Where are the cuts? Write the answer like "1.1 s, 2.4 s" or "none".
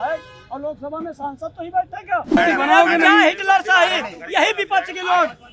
2.4 s